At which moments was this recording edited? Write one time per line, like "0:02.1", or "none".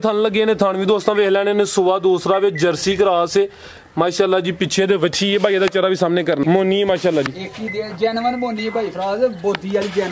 0:06.4